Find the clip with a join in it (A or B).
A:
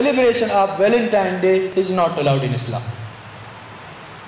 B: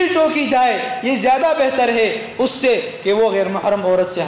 A